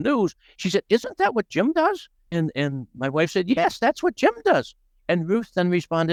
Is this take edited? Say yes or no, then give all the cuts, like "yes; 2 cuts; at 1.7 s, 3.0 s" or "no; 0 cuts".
no; 0 cuts